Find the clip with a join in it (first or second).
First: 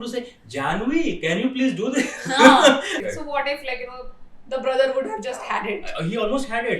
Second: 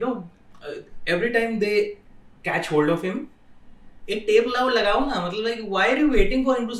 first